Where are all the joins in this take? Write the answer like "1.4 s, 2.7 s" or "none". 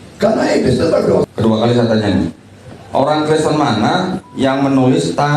1.3 s

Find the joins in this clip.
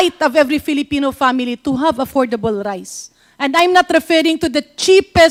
none

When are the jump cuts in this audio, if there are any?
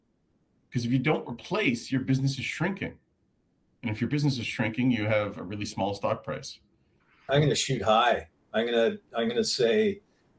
7.3 s

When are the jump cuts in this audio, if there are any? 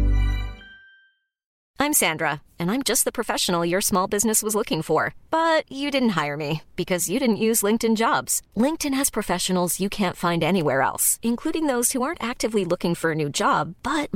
1.6 s

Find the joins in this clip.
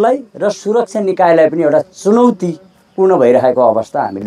none

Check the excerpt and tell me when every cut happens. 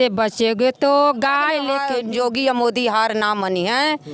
1.8 s

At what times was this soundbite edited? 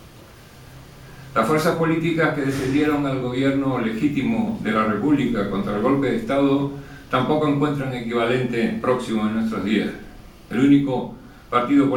none

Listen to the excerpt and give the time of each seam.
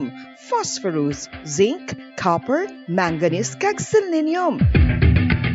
none

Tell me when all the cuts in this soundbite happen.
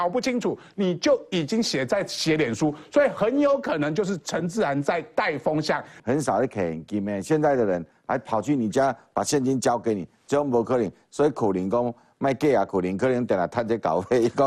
5.9 s

